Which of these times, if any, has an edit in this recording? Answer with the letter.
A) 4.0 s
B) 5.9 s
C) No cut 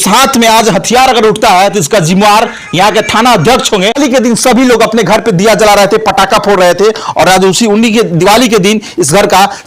A